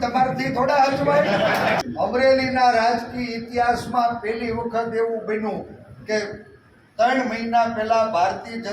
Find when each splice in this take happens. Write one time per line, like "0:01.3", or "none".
0:01.8